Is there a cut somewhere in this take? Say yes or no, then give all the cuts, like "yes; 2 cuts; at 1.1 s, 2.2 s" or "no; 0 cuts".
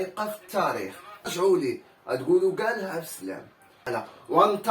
yes; 2 cuts; at 1.3 s, 3.9 s